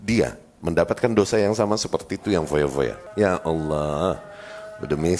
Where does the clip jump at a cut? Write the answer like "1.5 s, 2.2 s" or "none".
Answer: 3.0 s